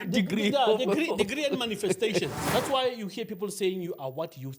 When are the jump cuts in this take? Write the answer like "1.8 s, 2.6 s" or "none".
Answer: 2.4 s